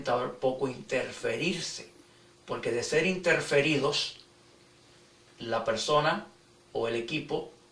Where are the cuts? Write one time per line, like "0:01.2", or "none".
0:05.9

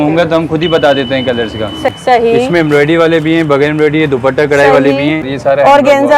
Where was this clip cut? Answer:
0:01.9
0:05.3

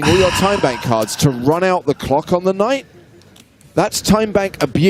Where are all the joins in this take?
none

